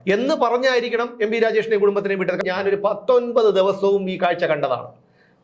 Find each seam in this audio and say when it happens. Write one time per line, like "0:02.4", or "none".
0:02.4